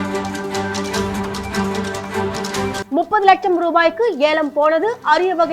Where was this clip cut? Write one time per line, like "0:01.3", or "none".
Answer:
0:02.8